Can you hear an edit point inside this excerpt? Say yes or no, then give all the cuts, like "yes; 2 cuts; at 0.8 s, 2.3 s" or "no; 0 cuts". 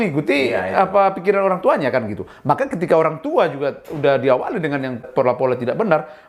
yes; 1 cut; at 5.1 s